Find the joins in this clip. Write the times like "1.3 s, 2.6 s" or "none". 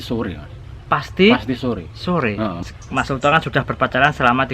2.6 s